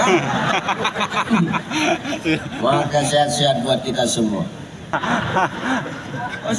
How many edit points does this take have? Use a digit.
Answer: 1